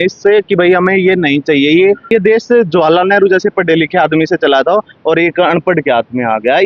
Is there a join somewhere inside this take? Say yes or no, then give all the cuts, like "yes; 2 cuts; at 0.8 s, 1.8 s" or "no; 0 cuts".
yes; 1 cut; at 2.1 s